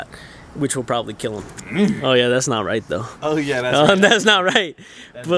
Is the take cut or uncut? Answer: cut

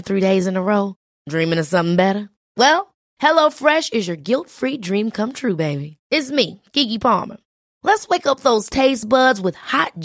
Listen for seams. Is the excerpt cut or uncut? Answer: uncut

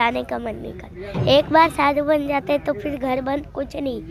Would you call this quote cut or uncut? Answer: uncut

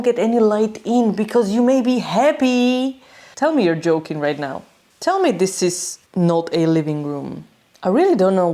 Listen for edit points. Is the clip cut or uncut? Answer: uncut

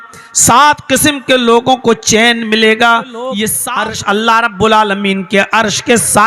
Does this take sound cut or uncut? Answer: cut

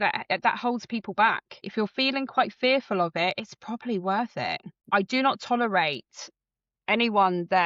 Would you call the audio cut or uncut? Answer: cut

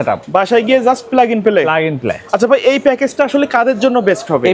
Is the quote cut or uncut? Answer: uncut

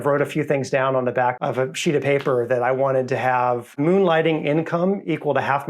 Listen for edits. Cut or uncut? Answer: cut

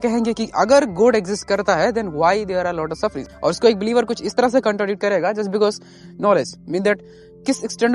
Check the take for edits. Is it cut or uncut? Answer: uncut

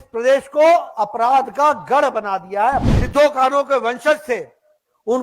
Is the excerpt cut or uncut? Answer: cut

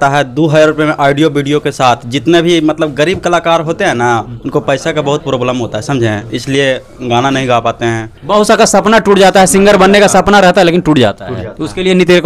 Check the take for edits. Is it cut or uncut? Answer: uncut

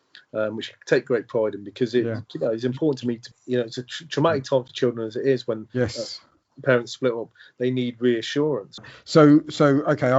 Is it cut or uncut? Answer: cut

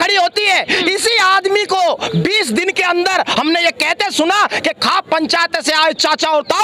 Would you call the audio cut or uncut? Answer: uncut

